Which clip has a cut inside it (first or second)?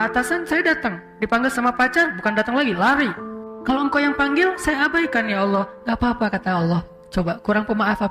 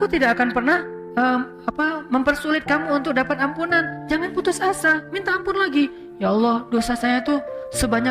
second